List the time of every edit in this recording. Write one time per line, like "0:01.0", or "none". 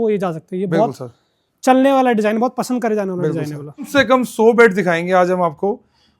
0:03.9